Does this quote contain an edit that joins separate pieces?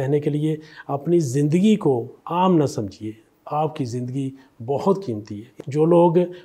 yes; 2 cuts; at 2.2 s, 5.6 s

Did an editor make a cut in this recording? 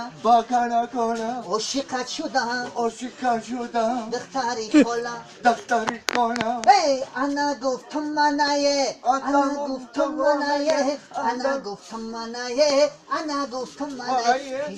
yes; 1 cut; at 4.9 s

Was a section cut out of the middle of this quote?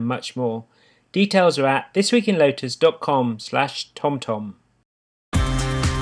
yes; 1 cut; at 4.9 s

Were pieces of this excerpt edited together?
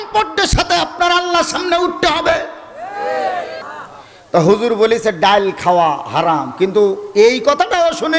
yes; 1 cut; at 3.6 s

